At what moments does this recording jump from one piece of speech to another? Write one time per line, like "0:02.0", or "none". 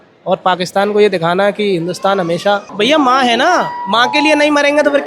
0:02.7